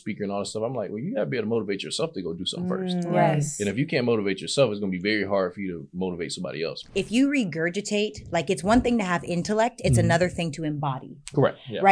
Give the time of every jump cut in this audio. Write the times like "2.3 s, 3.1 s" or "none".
6.8 s